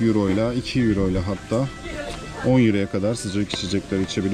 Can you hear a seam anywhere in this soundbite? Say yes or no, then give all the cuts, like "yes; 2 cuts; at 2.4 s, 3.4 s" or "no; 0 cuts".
no; 0 cuts